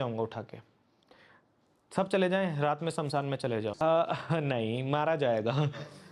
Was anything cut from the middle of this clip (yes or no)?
no